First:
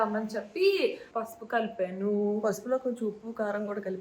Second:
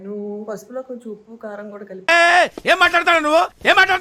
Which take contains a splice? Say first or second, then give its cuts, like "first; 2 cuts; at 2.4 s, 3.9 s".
first; 1 cut; at 1.0 s